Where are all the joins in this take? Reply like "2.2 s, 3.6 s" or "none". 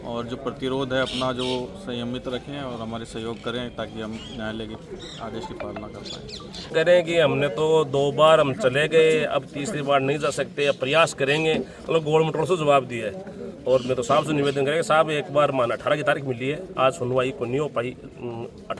6.7 s